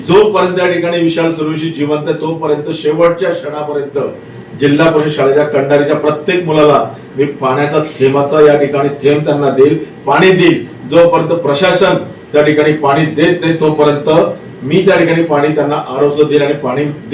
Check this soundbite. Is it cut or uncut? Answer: uncut